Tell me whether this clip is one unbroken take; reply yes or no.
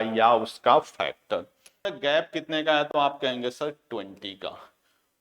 no